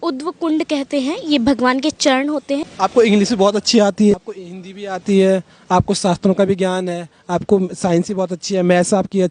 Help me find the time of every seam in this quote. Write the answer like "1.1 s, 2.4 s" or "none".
2.7 s, 4.1 s